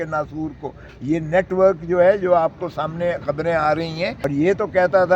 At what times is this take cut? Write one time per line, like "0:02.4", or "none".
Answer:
0:04.2